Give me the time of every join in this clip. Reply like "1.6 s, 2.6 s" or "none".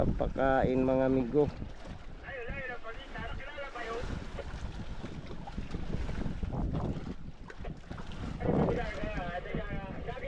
none